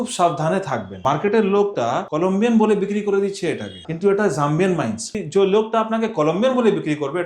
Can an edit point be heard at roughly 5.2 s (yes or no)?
yes